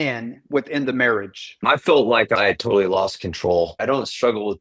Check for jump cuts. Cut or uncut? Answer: cut